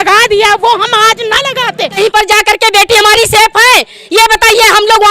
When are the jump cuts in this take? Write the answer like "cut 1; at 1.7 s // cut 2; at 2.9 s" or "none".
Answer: cut 1; at 2.0 s